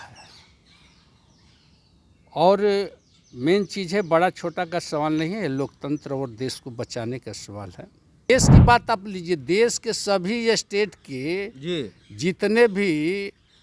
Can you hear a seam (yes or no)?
yes